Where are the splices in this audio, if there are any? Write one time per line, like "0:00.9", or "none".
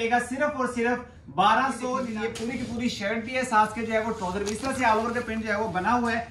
0:02.1